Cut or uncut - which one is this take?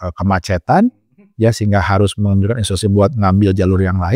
uncut